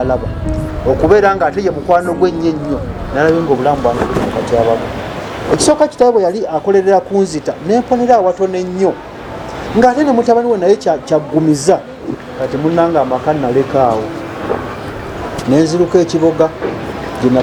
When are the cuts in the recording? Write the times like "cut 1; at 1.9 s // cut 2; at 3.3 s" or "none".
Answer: none